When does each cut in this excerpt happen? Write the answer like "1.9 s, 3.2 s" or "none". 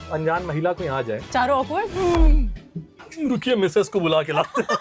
none